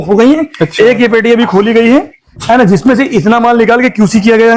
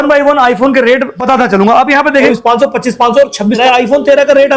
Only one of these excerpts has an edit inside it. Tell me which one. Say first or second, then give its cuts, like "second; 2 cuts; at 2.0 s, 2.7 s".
second; 3 cuts; at 1.2 s, 2.3 s, 3.6 s